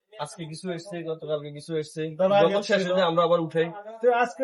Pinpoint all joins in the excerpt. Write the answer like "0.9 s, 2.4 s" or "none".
none